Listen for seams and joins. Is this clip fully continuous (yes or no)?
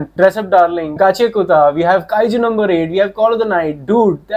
no